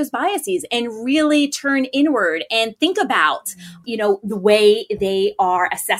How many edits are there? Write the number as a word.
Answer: one